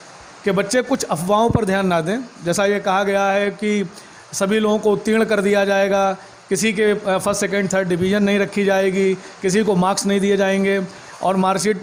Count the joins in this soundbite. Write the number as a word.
zero